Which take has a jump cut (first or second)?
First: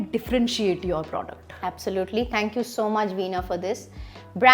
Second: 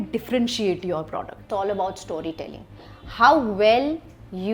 second